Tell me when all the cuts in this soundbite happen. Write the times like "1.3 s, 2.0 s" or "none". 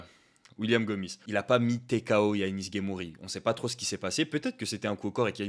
1.2 s